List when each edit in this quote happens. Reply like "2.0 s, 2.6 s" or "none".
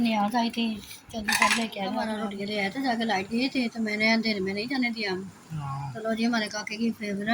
2.0 s